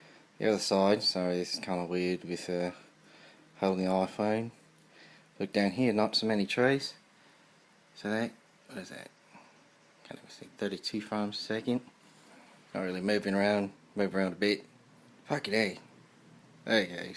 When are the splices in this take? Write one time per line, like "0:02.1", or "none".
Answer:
0:10.2